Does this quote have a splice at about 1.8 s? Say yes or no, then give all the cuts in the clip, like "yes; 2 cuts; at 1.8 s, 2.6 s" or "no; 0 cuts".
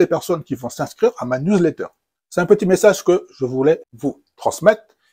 yes; 2 cuts; at 1.8 s, 3.9 s